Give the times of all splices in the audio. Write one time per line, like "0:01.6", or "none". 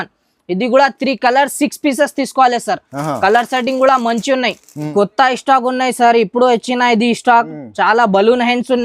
0:04.9

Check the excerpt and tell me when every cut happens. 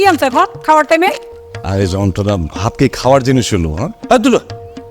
0:03.9

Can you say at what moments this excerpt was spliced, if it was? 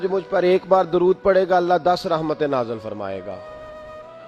none

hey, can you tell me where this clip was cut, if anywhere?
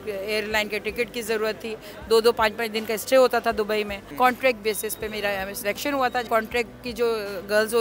0:04.0
0:06.3

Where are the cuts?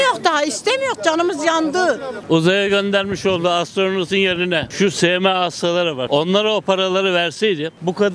0:02.1
0:04.7
0:06.0

